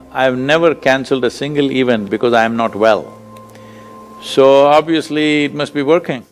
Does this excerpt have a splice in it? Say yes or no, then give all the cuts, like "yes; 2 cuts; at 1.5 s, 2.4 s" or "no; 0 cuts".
no; 0 cuts